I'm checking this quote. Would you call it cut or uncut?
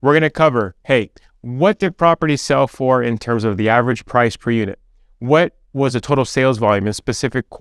uncut